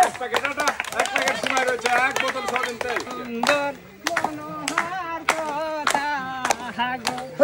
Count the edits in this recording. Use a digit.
1